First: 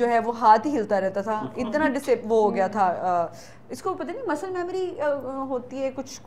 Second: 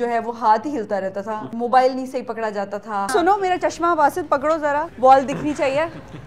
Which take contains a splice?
second; 3 cuts; at 1.5 s, 3.1 s, 4.9 s

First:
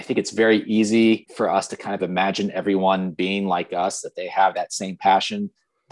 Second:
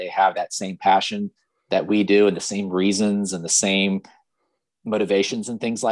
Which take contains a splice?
first; 1 cut; at 1.3 s

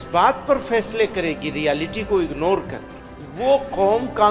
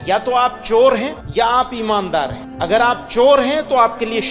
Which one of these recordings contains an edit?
second; 2 cuts; at 1.2 s, 2.4 s

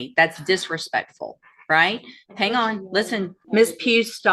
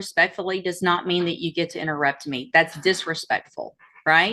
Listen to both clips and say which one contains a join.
first; 1 cut; at 3.4 s

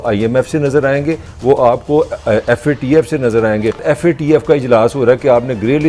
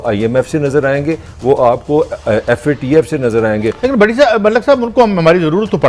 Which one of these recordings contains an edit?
first; 1 cut; at 3.8 s

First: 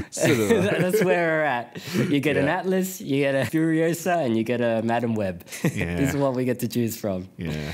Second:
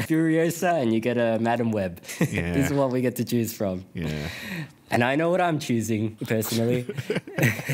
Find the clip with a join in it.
second; 1 cut; at 6.2 s

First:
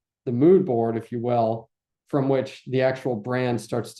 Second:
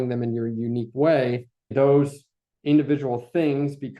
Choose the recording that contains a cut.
second; 1 cut; at 1.7 s

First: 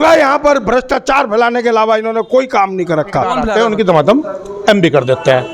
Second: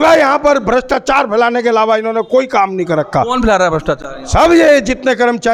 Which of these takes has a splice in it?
first; 1 cut; at 3.5 s

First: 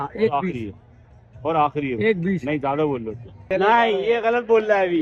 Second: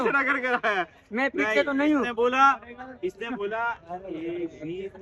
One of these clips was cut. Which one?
first; 1 cut; at 3.3 s

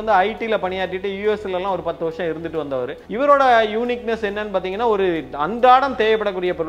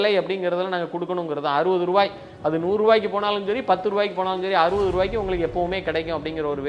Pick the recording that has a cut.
first; 1 cut; at 3.0 s

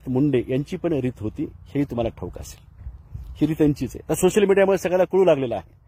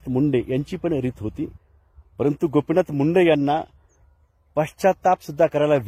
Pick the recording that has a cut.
second; 1 cut; at 1.6 s

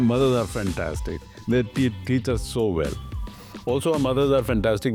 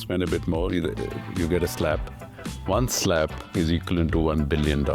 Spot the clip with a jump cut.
second; 1 cut; at 3.4 s

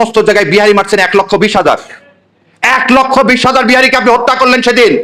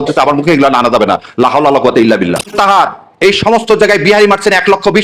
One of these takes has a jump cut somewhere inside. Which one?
second; 1 cut; at 2.5 s

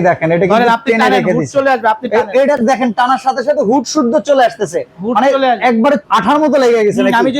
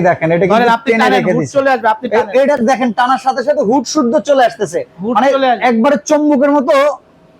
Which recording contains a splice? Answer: first; 1 cut; at 6.0 s

